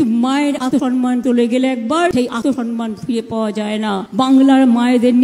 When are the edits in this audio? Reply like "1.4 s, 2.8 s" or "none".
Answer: 0.9 s, 2.5 s

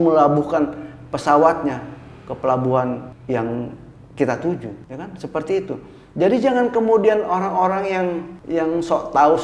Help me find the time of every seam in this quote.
3.1 s, 4.8 s, 8.3 s

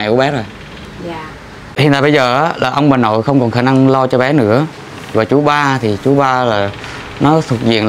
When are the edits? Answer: 1.7 s

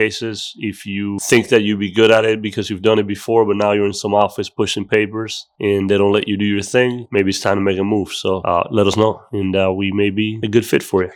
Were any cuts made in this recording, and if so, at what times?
none

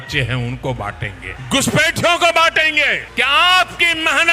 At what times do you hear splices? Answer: 1.3 s, 3.0 s

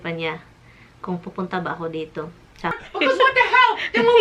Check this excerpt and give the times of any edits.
2.8 s

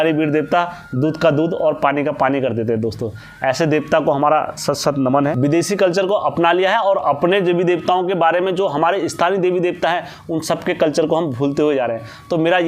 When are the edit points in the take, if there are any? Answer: 5.4 s

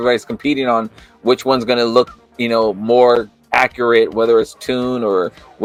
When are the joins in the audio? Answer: none

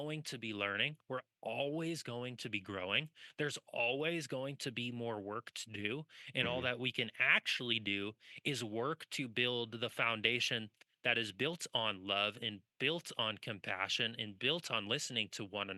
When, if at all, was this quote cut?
none

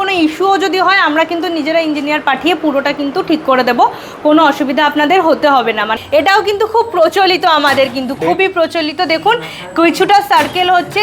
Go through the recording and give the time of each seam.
6.0 s

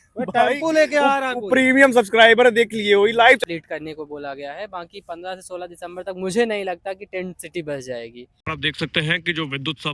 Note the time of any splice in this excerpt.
3.4 s, 8.2 s

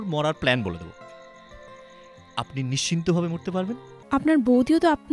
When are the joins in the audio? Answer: 3.9 s

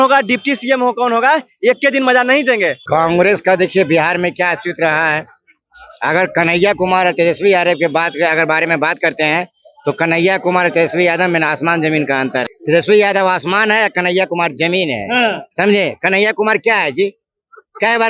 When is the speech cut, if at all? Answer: 2.8 s, 12.5 s

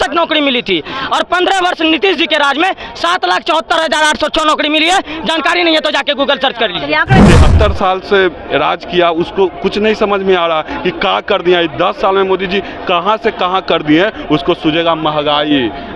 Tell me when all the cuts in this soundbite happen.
7.2 s

